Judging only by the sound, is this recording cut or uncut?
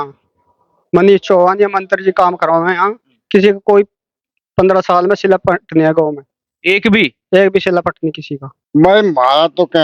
cut